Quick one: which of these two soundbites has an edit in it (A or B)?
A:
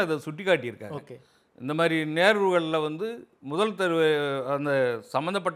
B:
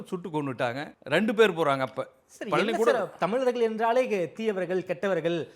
B